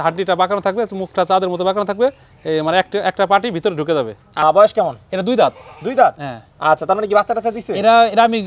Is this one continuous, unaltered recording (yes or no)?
no